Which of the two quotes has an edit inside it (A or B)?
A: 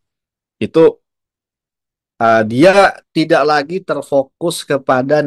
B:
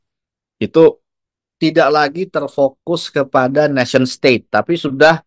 B